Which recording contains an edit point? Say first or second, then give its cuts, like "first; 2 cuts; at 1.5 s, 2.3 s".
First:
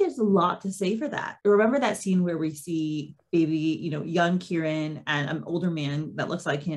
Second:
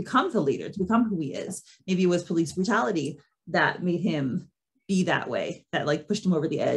first; 1 cut; at 1.3 s